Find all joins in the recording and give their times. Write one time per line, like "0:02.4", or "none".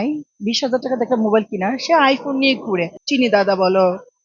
0:03.0